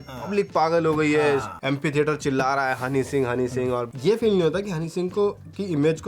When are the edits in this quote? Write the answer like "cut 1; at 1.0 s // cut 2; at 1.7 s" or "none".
cut 1; at 1.5 s // cut 2; at 3.9 s